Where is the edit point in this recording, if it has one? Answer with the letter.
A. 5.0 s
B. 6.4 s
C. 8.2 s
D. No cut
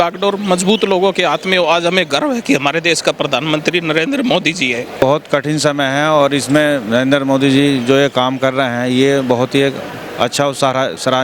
A